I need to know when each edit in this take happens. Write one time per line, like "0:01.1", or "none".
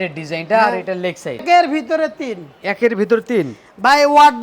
0:01.4